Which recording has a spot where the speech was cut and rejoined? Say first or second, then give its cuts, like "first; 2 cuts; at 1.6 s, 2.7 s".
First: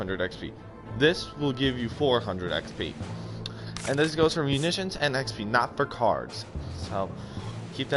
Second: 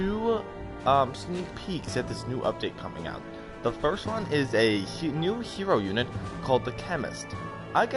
first; 1 cut; at 6.7 s